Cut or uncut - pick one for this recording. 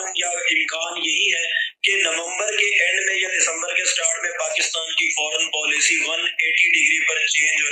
uncut